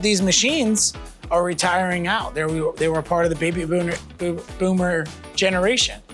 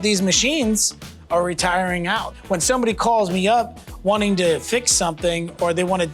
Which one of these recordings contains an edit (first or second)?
second